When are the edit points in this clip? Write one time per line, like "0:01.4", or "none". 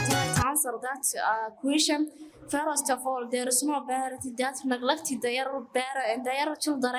none